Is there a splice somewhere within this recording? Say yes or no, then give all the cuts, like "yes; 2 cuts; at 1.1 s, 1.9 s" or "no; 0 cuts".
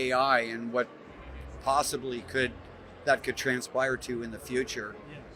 no; 0 cuts